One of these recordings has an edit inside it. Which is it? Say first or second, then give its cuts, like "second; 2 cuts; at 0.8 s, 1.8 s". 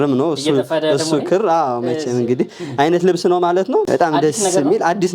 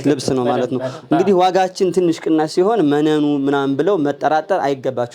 first; 1 cut; at 3.8 s